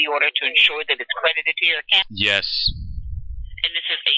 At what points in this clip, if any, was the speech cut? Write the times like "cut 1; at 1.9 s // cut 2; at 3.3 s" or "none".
cut 1; at 2.0 s